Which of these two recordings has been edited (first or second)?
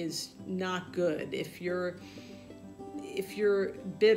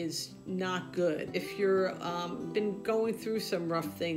second